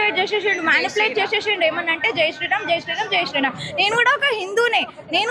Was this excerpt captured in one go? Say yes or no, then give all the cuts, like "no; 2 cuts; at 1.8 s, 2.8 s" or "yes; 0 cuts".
yes; 0 cuts